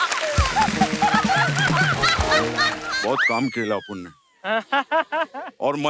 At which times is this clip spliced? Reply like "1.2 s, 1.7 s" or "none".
2.9 s

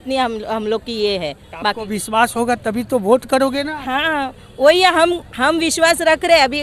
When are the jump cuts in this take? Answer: none

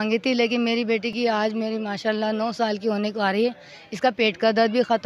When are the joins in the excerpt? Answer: none

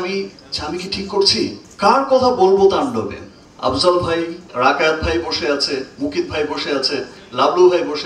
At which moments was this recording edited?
1.6 s, 4.5 s

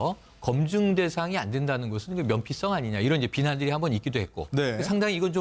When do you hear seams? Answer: 3.7 s

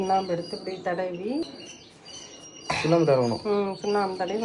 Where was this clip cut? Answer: 1.5 s

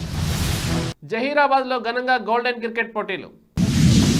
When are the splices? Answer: none

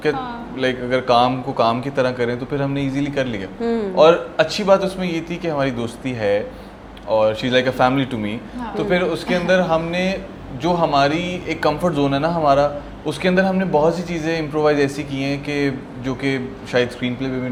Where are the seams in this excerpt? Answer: none

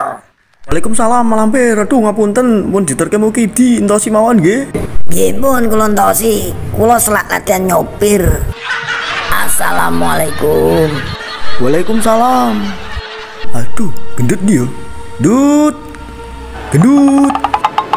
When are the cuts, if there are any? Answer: none

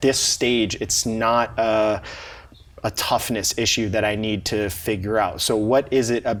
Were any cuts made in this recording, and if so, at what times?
none

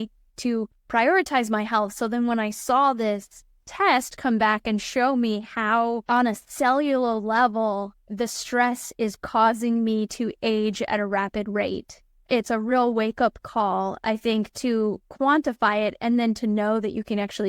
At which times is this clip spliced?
none

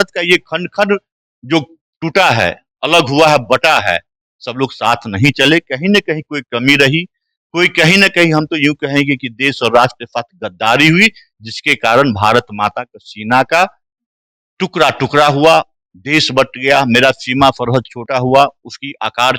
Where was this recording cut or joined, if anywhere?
none

